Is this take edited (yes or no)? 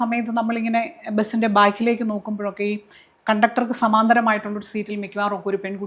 no